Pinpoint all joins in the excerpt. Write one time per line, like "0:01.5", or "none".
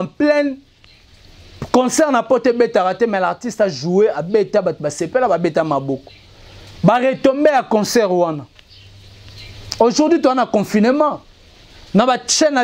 none